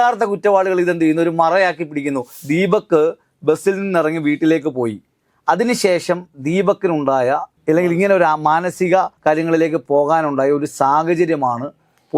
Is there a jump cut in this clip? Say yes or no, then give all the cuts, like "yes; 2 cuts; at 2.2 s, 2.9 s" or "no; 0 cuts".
yes; 1 cut; at 2.3 s